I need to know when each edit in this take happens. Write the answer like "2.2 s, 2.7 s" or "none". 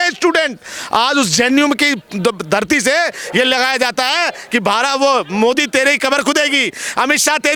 none